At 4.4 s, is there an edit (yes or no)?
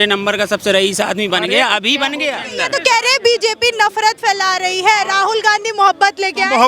no